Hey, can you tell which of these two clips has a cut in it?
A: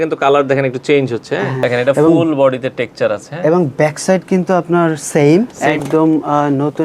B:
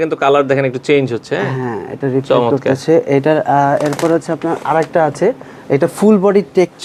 A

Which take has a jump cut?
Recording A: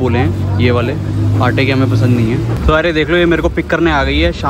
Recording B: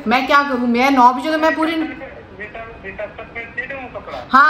A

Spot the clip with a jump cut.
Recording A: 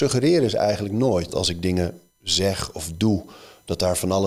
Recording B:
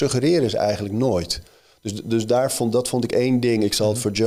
A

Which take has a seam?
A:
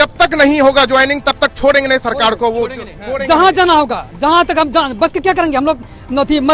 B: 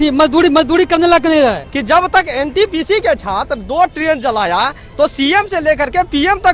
B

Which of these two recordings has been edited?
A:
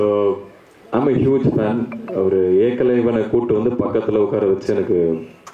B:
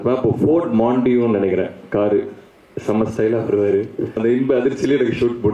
B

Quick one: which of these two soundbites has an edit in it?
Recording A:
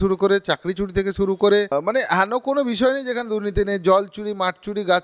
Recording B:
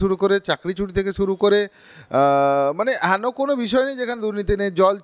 A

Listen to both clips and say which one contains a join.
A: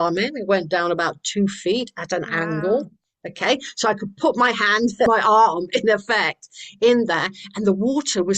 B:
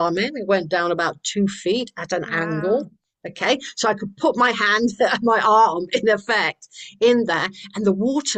A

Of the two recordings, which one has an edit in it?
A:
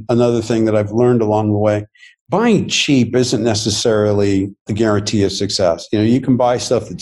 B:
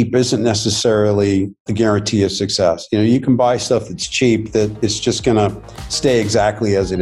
B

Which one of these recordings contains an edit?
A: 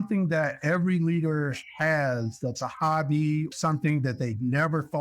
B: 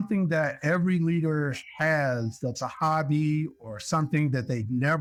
A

